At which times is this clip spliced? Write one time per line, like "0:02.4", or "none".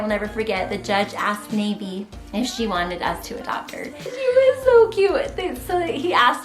0:04.0